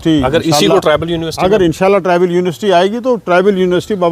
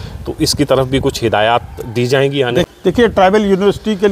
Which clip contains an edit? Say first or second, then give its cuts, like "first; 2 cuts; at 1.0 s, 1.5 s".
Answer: second; 1 cut; at 2.6 s